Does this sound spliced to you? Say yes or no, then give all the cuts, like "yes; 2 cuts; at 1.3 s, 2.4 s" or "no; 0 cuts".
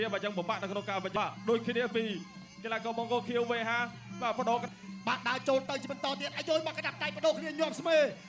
yes; 2 cuts; at 1.1 s, 4.6 s